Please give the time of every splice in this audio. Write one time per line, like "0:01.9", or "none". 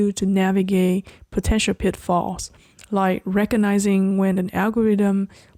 none